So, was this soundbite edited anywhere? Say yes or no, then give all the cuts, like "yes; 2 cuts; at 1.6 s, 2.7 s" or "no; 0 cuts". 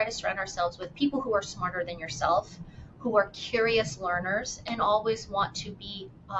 no; 0 cuts